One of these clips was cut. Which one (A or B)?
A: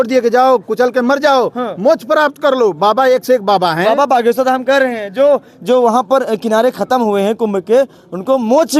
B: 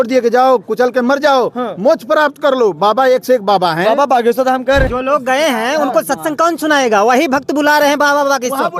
B